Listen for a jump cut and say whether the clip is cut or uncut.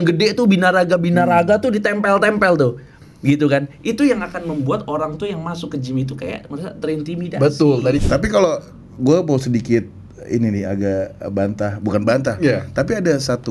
cut